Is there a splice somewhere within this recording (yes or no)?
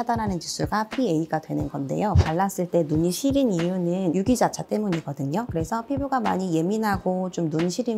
yes